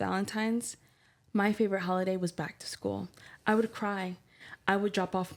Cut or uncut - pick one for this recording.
uncut